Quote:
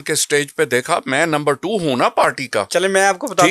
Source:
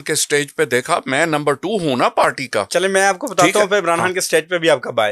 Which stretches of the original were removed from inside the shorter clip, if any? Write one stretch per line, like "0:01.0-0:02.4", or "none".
none